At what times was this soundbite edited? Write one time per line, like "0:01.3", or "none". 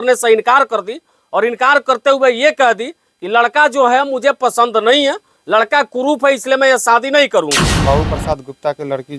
0:07.7